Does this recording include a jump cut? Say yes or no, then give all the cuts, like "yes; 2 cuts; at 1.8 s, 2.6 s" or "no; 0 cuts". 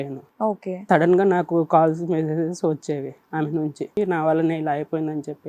yes; 1 cut; at 3.9 s